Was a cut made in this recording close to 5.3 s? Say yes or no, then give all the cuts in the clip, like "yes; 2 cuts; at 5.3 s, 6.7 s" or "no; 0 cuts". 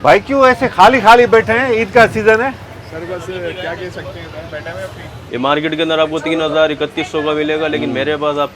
yes; 1 cut; at 5.3 s